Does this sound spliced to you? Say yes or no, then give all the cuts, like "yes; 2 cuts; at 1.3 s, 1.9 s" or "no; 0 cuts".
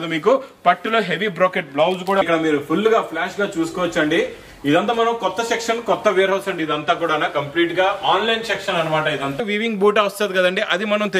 yes; 2 cuts; at 2.2 s, 9.4 s